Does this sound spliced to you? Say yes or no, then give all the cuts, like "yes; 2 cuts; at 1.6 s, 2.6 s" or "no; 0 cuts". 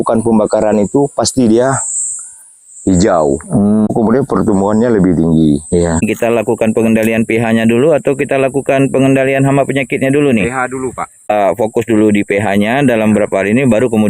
yes; 3 cuts; at 3.9 s, 6.0 s, 11.3 s